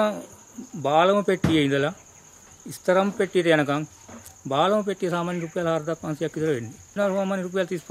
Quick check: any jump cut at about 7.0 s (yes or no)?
yes